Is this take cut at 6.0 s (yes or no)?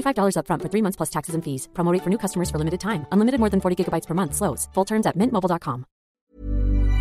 yes